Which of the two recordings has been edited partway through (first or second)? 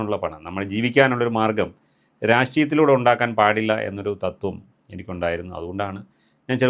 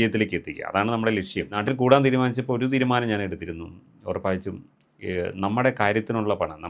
second